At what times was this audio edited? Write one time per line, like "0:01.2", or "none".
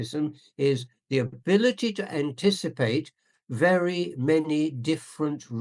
none